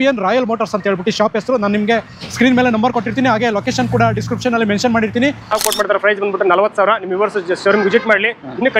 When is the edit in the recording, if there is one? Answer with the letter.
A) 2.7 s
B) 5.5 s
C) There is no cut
B